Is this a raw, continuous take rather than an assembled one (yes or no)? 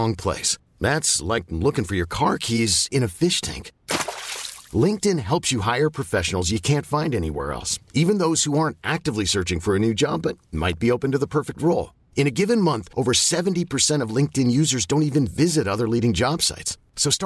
yes